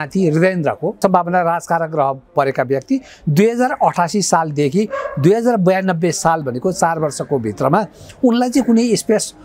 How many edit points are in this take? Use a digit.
1